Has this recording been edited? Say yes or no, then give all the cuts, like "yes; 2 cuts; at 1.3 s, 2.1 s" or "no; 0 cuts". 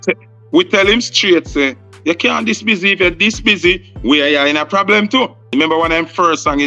yes; 1 cut; at 5.5 s